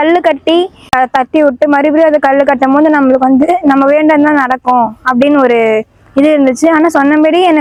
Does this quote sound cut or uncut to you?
uncut